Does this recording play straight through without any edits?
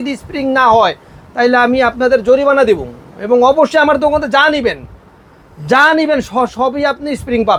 yes; 0 cuts

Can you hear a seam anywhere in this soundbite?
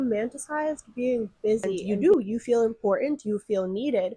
yes; 1 cut; at 1.8 s

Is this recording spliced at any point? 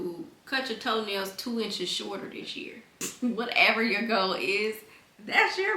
yes; 1 cut; at 3.0 s

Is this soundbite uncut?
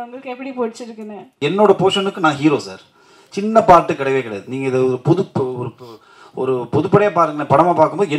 no; 1 cut; at 1.2 s

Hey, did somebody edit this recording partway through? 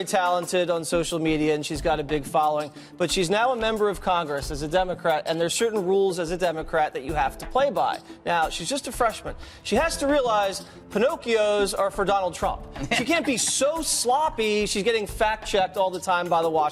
no; 0 cuts

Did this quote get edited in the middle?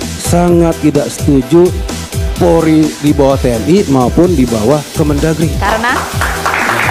no; 0 cuts

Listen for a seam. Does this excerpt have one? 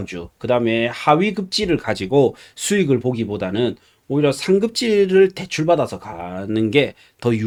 no; 0 cuts

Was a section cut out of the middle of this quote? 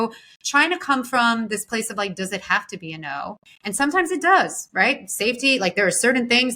yes; 1 cut; at 3.5 s

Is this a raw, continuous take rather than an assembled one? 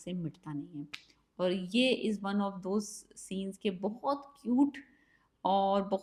yes; 0 cuts

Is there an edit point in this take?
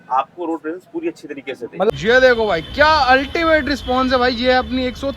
yes; 1 cut; at 1.9 s

